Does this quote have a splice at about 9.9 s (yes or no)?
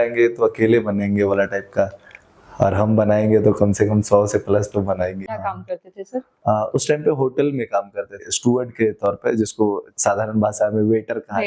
yes